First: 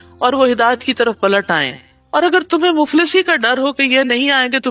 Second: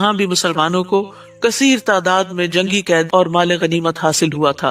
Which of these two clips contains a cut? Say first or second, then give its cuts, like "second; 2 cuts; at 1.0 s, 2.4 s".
second; 1 cut; at 3.1 s